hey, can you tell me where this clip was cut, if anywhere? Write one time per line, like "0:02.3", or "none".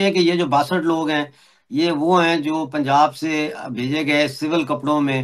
none